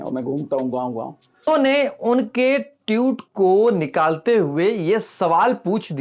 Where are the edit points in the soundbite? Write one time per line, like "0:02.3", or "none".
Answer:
0:01.5